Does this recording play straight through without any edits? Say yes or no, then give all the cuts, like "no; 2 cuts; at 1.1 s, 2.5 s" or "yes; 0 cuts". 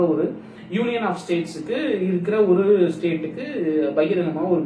yes; 0 cuts